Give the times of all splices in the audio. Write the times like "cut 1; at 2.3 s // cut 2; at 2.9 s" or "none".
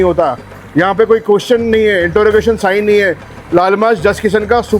none